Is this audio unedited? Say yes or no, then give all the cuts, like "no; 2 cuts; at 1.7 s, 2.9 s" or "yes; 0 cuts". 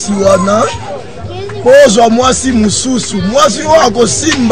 yes; 0 cuts